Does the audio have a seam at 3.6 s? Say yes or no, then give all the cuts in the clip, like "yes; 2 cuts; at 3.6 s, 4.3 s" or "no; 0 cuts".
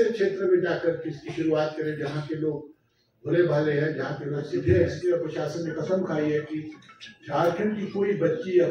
no; 1 cut; at 4.9 s